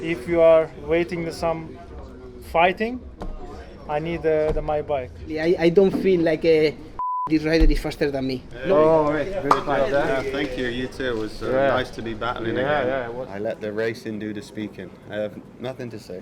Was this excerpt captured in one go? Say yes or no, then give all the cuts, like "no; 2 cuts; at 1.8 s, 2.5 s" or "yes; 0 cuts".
no; 3 cuts; at 5.4 s, 8.5 s, 13.1 s